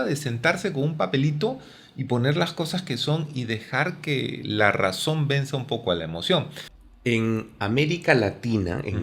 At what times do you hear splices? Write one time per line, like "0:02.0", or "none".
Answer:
0:06.6